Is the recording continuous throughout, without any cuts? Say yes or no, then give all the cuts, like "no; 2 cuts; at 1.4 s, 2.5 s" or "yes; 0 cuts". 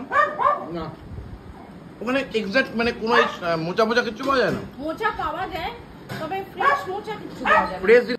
yes; 0 cuts